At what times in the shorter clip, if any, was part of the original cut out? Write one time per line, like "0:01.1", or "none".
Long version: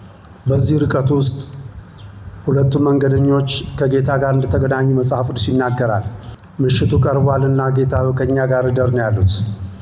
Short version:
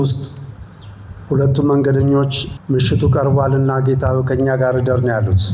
0:02.4